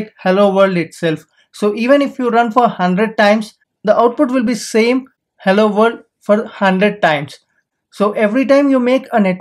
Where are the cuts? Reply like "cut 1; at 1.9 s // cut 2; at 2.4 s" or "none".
cut 1; at 7.6 s

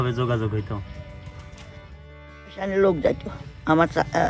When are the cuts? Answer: none

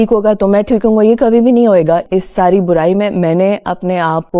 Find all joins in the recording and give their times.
cut 1; at 2.0 s

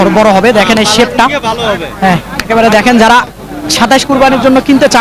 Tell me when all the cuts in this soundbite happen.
none

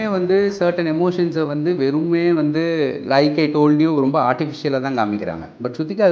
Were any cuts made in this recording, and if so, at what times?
none

